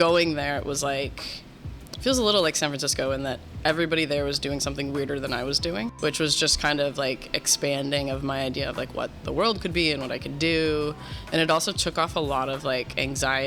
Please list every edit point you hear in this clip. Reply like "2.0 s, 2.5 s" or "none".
5.9 s